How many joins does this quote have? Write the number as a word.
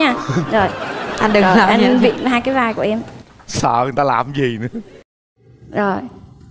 zero